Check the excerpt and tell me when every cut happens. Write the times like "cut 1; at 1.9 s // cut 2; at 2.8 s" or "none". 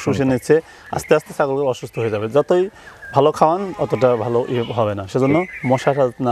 none